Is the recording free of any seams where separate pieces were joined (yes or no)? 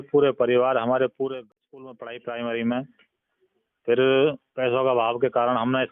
no